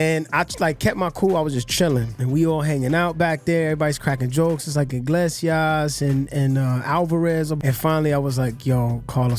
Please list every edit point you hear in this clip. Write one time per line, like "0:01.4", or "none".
0:02.1
0:07.6